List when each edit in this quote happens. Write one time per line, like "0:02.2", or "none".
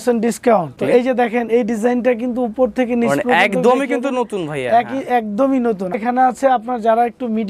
0:00.8
0:05.9